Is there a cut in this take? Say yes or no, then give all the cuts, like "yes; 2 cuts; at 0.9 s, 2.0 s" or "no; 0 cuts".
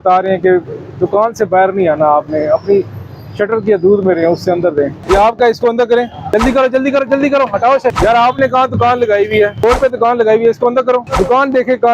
yes; 5 cuts; at 5.0 s, 6.2 s, 8.0 s, 9.6 s, 11.1 s